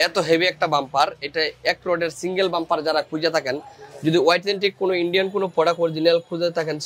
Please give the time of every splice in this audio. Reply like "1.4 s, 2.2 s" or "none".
none

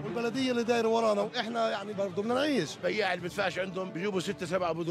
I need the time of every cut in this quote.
none

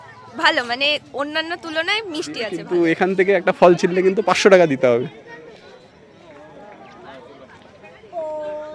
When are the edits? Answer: 2.5 s

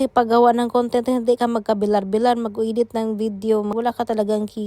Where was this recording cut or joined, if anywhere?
3.7 s

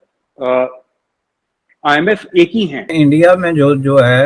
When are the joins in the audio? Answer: 2.9 s

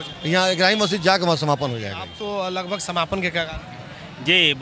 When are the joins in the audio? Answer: 2.1 s

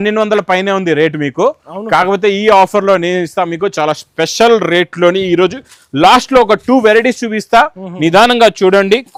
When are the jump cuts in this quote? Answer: none

